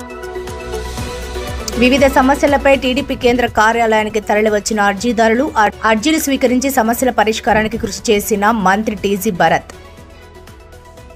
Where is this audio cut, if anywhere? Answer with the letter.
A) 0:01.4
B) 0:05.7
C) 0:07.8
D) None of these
A